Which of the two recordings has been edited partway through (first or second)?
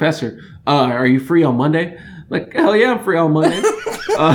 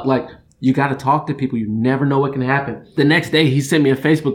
second